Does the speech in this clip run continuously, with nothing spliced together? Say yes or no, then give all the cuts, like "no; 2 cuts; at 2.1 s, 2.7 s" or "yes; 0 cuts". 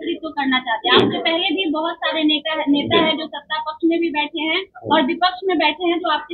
yes; 0 cuts